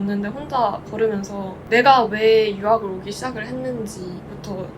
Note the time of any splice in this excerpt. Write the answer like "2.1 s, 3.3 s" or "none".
1.5 s